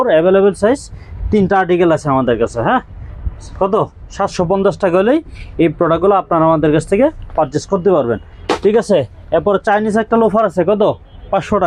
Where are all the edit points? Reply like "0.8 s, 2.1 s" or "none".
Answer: none